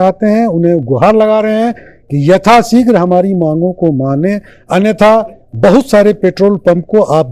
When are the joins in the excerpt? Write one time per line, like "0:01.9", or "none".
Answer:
none